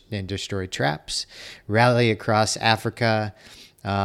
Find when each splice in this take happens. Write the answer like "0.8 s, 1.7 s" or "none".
none